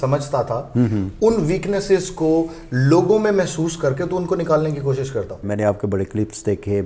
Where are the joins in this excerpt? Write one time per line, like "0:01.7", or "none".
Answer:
0:05.4